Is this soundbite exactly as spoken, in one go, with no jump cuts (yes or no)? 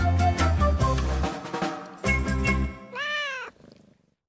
no